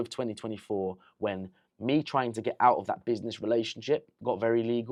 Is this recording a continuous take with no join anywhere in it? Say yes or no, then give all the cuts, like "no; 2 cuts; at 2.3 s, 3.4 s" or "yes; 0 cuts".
yes; 0 cuts